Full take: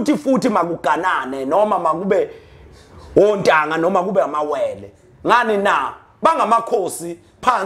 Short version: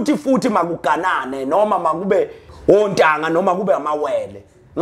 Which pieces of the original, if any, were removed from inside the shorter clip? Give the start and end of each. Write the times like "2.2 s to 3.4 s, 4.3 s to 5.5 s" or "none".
2.4 s to 2.9 s